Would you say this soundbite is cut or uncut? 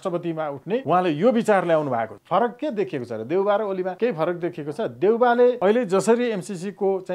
cut